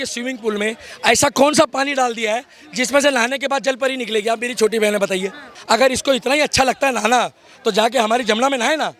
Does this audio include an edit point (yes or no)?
yes